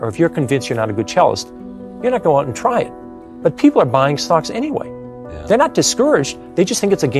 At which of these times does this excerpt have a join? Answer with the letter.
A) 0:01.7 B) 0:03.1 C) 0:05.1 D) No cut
D